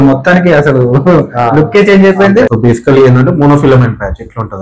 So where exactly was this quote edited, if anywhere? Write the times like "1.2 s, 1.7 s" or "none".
2.5 s